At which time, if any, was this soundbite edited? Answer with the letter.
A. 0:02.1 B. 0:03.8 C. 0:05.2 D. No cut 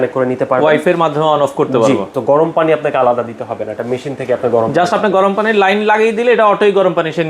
A